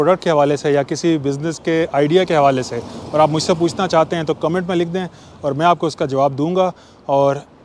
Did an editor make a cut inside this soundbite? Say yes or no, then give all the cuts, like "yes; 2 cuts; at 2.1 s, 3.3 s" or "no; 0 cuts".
no; 0 cuts